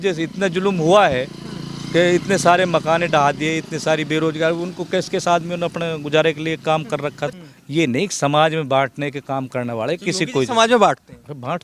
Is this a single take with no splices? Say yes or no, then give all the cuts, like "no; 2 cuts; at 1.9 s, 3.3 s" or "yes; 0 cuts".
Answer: no; 1 cut; at 7.4 s